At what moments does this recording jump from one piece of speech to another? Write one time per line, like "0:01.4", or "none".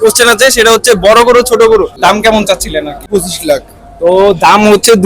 0:01.9
0:03.0